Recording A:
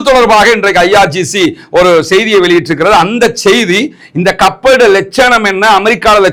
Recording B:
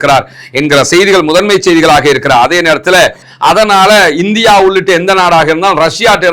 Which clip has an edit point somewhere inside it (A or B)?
B